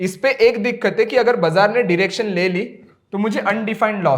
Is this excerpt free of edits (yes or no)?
yes